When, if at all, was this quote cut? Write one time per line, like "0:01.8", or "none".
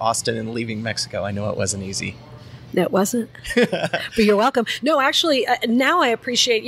none